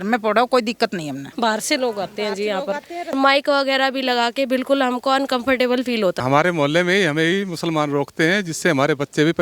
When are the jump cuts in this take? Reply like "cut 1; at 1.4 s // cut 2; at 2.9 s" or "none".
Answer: cut 1; at 3.1 s // cut 2; at 6.2 s